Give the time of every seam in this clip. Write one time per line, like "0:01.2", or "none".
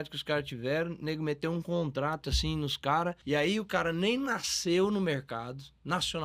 0:03.2